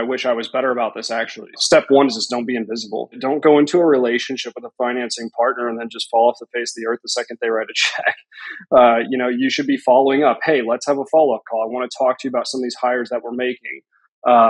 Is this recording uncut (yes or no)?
no